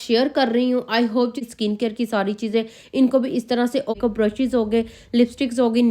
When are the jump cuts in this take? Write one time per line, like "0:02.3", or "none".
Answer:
0:01.4
0:04.0